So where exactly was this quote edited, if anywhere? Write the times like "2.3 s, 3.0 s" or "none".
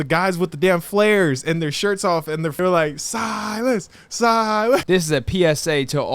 2.4 s, 4.8 s